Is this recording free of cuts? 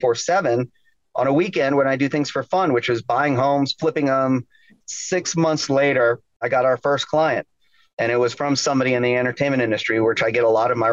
no; 2 cuts; at 4.8 s, 6.5 s

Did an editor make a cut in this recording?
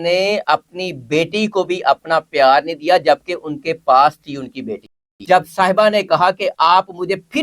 yes; 1 cut; at 4.9 s

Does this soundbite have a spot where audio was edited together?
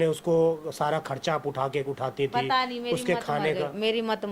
no; 0 cuts

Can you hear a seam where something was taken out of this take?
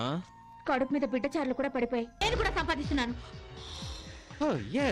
yes; 1 cut; at 2.2 s

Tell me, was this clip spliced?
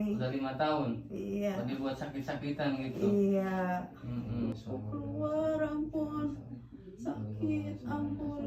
yes; 1 cut; at 4.5 s

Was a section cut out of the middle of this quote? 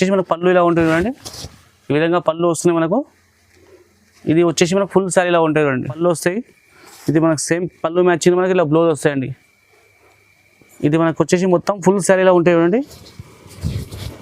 yes; 1 cut; at 6.0 s

